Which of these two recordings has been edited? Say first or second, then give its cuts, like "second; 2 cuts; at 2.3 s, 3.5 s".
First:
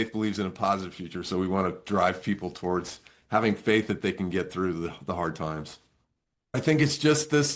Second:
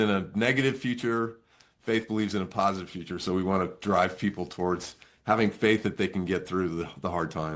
first; 1 cut; at 6.6 s